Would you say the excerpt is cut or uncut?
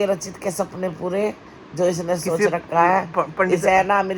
uncut